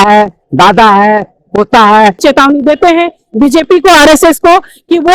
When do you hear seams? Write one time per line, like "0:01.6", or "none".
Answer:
0:02.2